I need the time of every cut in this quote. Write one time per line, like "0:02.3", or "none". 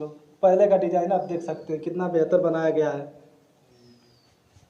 none